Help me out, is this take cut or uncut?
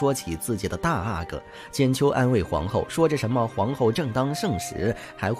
uncut